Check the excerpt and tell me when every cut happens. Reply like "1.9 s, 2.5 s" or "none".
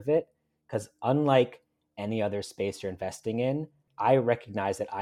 3.9 s